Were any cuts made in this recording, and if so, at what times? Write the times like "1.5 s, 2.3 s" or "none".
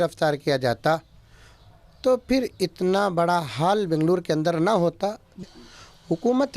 5.5 s